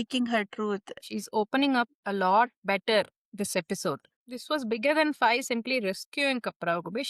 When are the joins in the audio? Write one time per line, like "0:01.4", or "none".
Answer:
0:01.0
0:04.2